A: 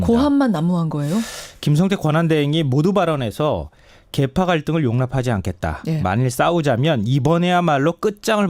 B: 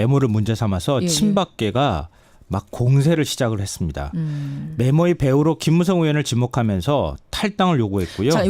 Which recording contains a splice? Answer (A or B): B